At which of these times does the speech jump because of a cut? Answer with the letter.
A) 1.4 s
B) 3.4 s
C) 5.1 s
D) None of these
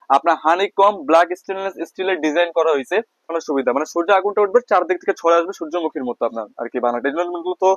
B